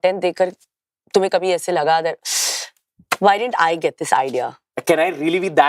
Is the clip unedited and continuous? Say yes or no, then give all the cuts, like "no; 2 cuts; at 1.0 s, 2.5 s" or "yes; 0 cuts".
no; 1 cut; at 4.7 s